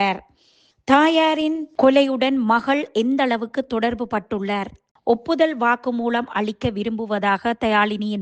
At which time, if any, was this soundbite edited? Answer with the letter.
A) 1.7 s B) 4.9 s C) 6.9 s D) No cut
B